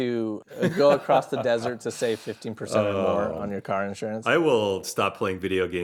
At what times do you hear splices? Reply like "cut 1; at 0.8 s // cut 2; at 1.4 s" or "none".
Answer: none